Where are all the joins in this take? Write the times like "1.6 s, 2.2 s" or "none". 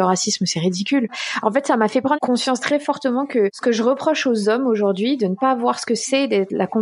1.3 s, 2.2 s, 3.6 s